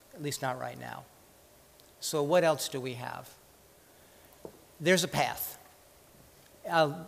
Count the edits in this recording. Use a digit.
1